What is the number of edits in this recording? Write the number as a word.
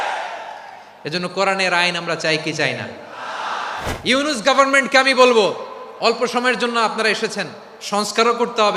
one